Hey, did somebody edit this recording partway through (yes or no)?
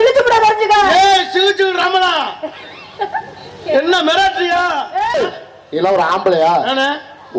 yes